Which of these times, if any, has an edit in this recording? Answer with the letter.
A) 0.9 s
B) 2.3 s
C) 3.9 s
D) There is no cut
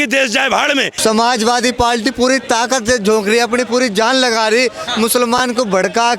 A